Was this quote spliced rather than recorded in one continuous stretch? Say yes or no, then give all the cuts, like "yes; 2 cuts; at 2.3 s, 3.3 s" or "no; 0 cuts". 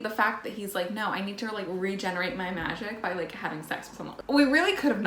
no; 0 cuts